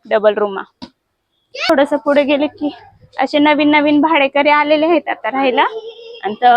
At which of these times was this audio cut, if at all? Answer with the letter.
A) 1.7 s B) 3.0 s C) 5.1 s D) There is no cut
A